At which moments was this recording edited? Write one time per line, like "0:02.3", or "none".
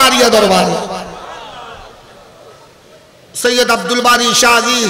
0:02.8

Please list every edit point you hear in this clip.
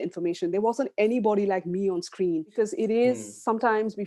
0:02.5

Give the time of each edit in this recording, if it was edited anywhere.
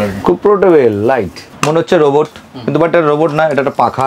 0:01.5

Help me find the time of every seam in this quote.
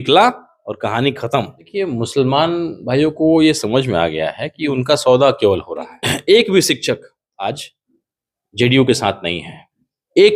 0:01.7
0:06.1

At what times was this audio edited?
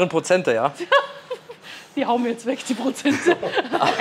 none

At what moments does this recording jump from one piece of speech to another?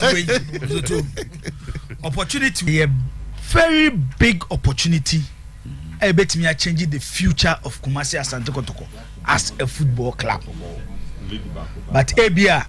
0:02.7

